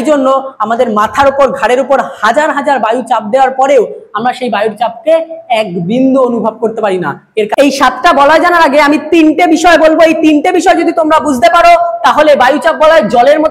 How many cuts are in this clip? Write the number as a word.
one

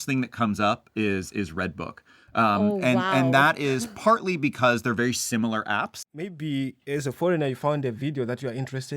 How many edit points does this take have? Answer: one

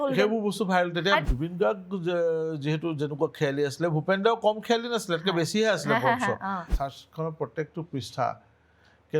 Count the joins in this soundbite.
two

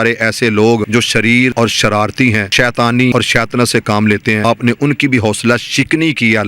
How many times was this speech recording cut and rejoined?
four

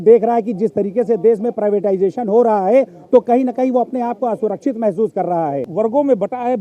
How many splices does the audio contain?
one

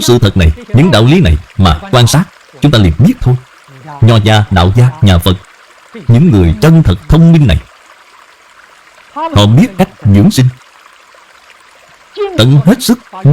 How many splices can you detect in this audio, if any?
two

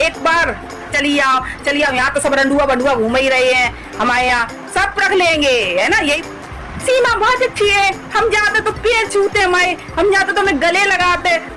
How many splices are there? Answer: two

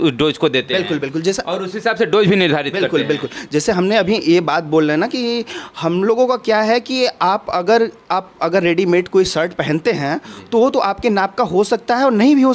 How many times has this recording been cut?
zero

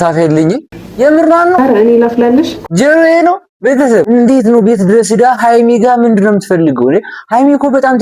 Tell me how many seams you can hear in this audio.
three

